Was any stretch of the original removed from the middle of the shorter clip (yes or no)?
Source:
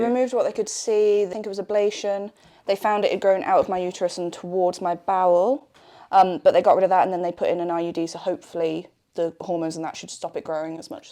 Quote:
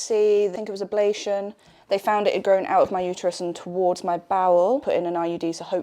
yes